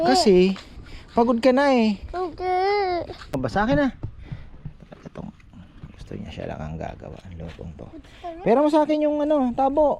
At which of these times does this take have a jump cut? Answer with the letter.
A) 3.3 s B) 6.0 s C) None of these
A